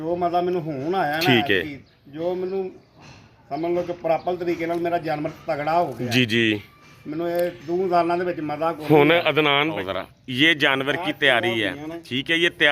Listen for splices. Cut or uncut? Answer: cut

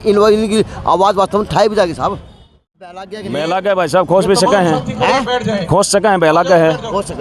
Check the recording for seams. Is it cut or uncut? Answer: cut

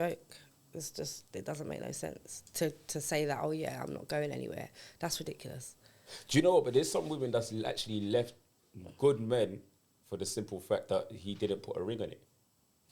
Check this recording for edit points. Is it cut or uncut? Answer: uncut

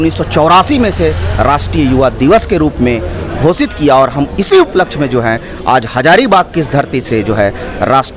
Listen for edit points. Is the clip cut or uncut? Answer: uncut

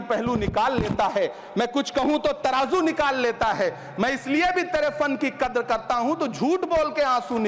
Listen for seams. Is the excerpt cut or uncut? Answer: uncut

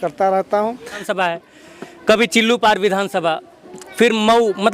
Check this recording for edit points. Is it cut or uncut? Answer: cut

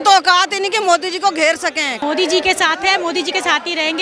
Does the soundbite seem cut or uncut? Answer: cut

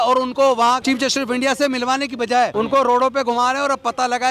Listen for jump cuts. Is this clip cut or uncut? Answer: cut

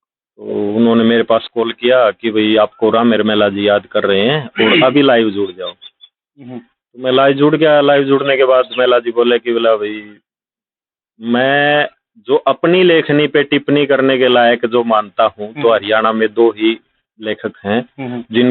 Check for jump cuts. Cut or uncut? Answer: uncut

